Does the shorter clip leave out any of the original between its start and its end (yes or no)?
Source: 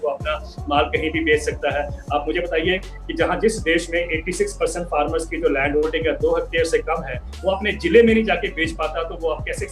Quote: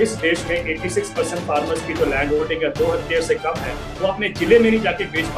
no